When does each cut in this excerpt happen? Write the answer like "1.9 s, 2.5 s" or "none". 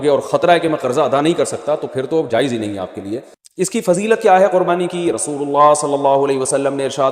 3.4 s